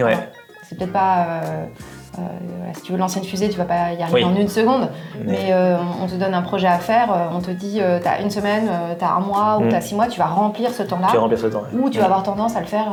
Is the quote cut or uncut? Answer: uncut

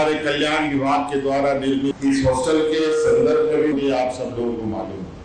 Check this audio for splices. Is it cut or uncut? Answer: cut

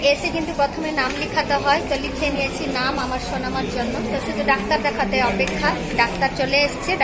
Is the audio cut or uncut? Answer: uncut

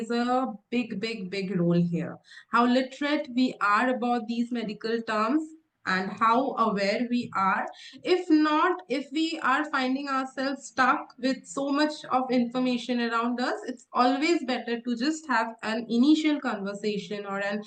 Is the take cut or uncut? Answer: uncut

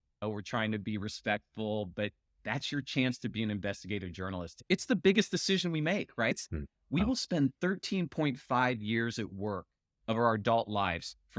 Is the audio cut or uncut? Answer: cut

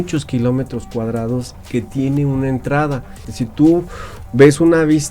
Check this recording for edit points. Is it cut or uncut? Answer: cut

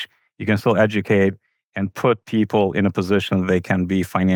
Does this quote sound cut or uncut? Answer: uncut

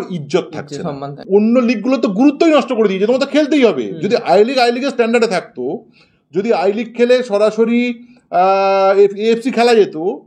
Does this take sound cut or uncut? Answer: cut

